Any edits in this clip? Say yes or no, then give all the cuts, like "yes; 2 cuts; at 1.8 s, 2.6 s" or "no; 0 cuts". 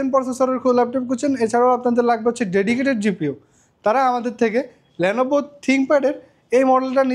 no; 0 cuts